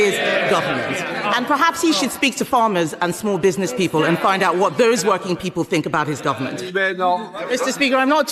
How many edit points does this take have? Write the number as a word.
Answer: one